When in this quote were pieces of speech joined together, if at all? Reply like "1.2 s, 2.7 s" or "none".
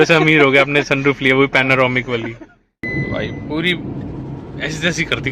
2.8 s